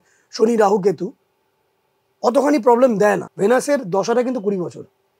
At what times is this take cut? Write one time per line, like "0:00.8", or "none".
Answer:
0:03.3